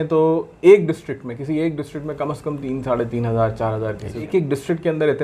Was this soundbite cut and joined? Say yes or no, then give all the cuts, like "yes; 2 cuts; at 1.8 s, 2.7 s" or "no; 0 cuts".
yes; 1 cut; at 4.3 s